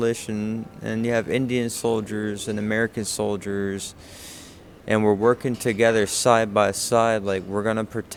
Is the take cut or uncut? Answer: uncut